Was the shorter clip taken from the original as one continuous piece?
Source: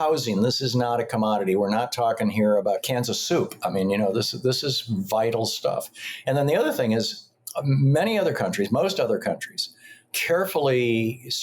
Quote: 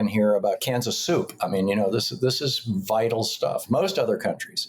no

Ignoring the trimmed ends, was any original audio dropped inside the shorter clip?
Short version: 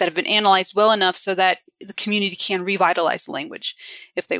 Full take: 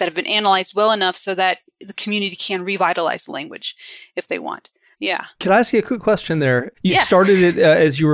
no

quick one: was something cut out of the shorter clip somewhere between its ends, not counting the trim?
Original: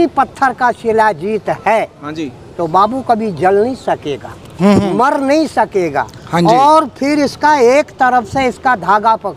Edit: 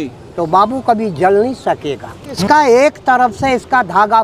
yes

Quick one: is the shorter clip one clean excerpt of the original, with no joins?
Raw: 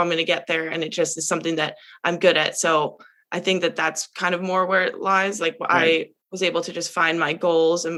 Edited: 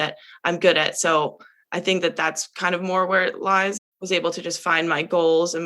no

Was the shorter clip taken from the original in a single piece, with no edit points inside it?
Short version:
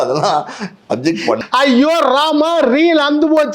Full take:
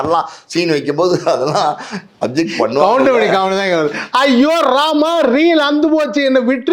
no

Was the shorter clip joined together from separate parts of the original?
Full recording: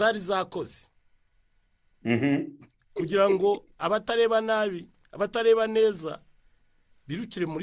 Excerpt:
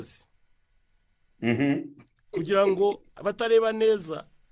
yes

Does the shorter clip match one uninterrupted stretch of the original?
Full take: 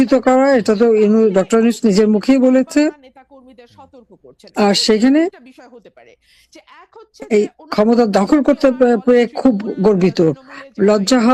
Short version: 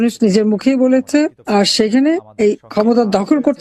no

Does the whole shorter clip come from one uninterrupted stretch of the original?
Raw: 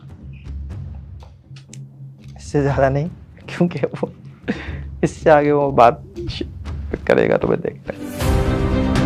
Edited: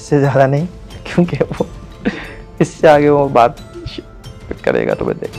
yes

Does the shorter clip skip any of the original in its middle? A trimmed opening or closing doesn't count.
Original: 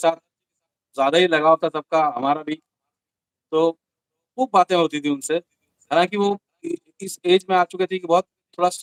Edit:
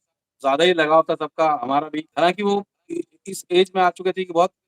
yes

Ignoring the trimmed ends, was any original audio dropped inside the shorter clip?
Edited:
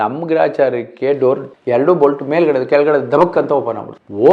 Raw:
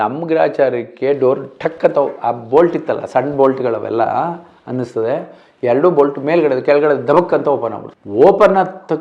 yes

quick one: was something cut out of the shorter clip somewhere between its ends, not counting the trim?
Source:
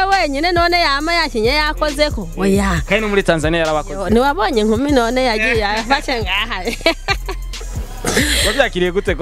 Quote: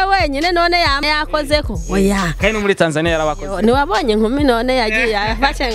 yes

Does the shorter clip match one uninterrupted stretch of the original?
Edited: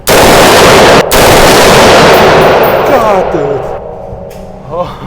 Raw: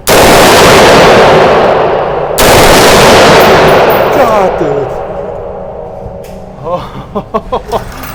no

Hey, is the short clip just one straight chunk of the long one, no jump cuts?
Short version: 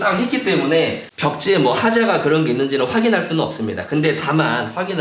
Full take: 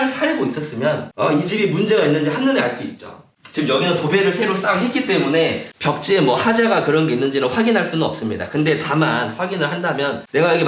yes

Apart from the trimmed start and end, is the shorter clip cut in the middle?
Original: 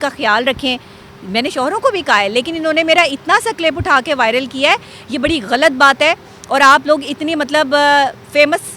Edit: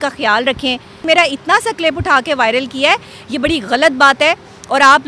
yes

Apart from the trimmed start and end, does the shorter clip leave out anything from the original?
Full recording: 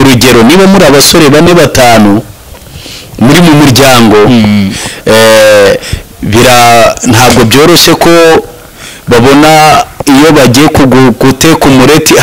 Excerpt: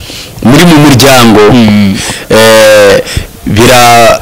no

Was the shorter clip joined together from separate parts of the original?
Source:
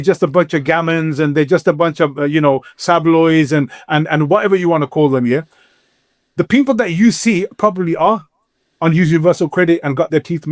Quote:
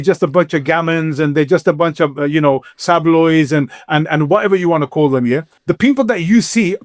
yes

